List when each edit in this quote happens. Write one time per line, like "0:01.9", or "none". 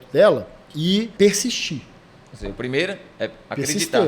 0:01.1